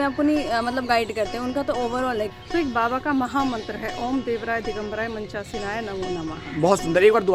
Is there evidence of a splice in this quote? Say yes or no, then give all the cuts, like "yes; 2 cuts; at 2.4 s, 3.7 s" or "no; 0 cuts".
yes; 1 cut; at 2.3 s